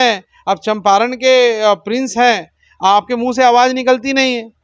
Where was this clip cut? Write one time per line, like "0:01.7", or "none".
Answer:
none